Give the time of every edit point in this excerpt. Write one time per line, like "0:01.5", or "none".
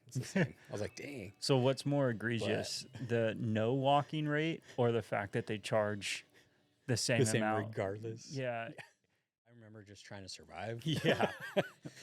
0:09.3